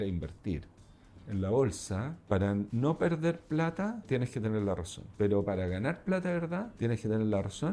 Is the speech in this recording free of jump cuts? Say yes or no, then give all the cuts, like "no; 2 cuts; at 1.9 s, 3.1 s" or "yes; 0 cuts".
no; 6 cuts; at 1.2 s, 2.2 s, 2.7 s, 4.0 s, 5.0 s, 6.7 s